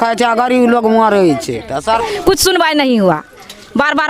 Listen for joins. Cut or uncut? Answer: cut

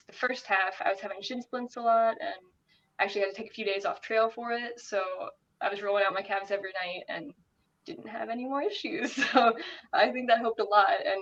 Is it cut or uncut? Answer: uncut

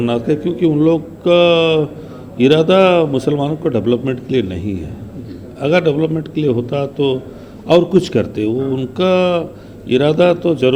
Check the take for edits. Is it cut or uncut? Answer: uncut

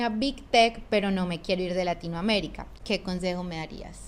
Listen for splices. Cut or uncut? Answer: uncut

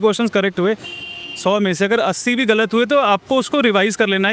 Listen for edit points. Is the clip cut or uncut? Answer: uncut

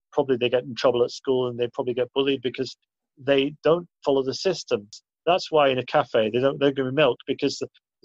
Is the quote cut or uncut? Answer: cut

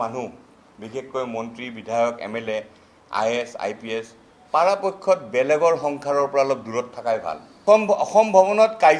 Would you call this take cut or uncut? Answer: cut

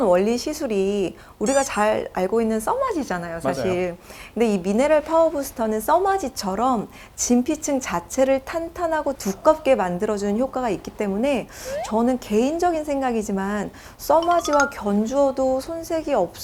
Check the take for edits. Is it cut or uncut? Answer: uncut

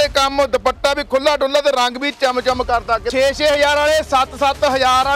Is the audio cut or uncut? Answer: cut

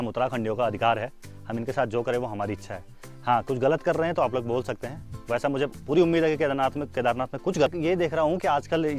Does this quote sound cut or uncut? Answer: cut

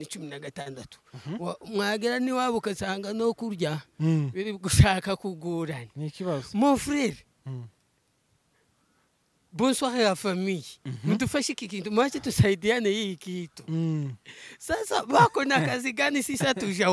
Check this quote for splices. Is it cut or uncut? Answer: uncut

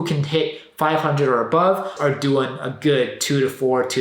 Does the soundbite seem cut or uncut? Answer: cut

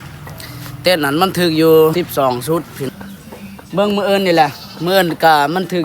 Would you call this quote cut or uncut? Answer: cut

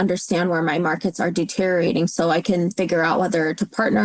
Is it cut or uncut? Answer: uncut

